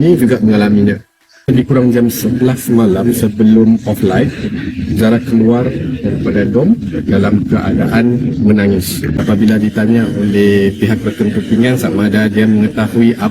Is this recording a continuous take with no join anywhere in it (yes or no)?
no